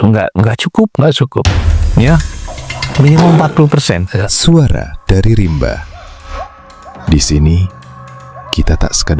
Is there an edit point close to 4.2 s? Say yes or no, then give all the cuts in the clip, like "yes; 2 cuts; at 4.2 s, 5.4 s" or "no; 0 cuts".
yes; 1 cut; at 4.2 s